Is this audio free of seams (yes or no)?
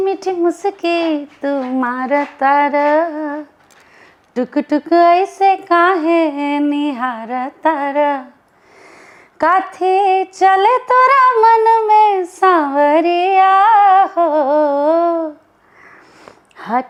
yes